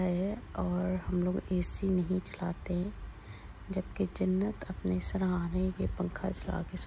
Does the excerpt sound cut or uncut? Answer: uncut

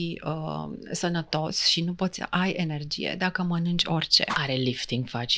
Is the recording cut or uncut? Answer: cut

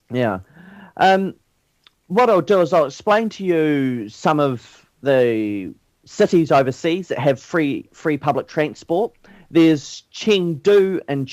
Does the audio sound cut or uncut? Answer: cut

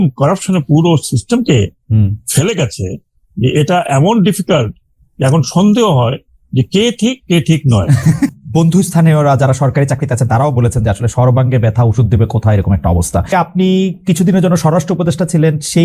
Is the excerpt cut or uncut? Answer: cut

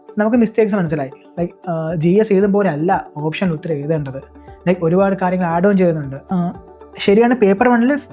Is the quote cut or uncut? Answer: cut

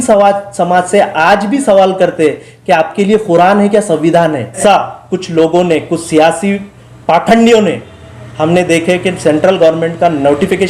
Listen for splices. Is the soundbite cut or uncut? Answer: cut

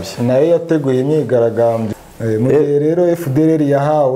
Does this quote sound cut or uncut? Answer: cut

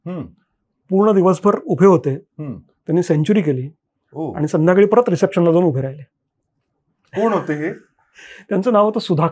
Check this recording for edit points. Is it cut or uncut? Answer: uncut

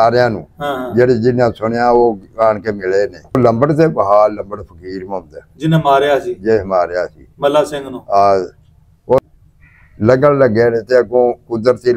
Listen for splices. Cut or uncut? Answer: cut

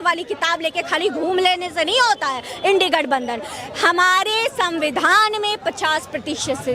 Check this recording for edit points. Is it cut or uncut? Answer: uncut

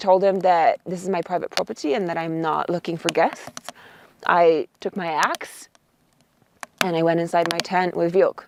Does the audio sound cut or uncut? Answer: uncut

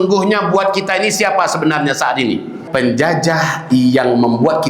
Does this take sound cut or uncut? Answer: cut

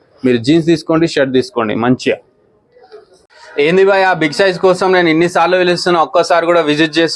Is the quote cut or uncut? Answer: cut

